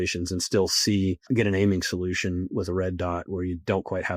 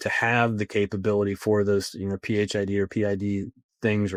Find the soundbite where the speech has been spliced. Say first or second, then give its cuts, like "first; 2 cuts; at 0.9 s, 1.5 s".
first; 1 cut; at 1.2 s